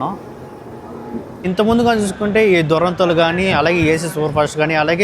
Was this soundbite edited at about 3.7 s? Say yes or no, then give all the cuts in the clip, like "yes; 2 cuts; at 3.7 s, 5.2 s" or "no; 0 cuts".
no; 1 cut; at 1.4 s